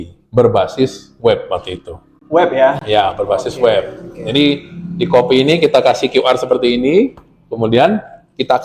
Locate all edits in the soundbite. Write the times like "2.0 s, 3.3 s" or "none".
none